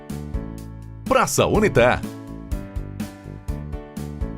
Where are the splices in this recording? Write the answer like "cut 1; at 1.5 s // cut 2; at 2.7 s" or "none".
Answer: cut 1; at 1.1 s // cut 2; at 2.7 s